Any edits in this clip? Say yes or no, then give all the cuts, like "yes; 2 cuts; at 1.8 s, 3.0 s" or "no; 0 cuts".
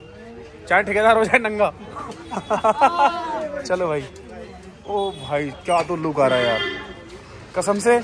no; 0 cuts